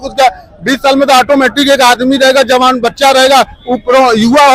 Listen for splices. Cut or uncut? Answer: uncut